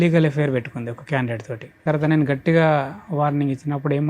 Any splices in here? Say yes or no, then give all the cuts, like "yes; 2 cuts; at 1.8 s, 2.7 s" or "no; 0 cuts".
yes; 1 cut; at 1.8 s